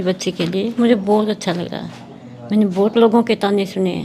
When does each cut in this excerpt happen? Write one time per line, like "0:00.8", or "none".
none